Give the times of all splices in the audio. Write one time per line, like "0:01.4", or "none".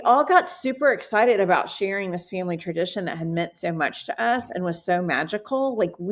none